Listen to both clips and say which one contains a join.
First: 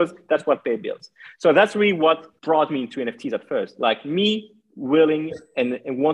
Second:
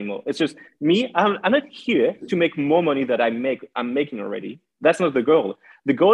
first; 1 cut; at 2.3 s

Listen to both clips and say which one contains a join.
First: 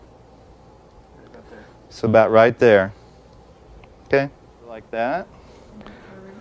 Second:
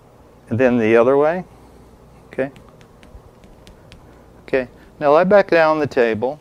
first; 1 cut; at 4.9 s

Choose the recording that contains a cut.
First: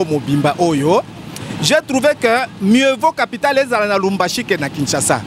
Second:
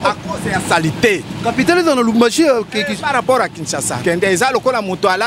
second; 1 cut; at 3.9 s

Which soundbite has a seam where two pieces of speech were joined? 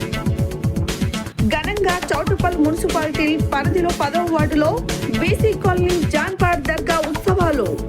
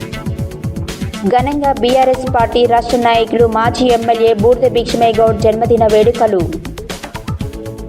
second; 1 cut; at 1.0 s

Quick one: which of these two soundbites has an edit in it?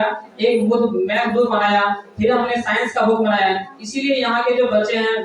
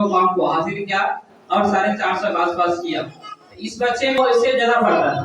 second; 1 cut; at 4.2 s

